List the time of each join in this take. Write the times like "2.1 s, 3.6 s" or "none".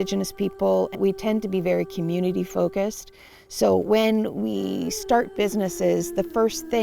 1.0 s